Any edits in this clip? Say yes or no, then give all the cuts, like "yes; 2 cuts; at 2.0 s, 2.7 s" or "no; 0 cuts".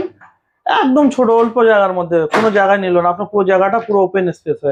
no; 0 cuts